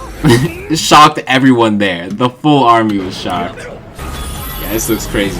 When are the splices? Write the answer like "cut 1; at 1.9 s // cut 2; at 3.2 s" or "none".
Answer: cut 1; at 3.9 s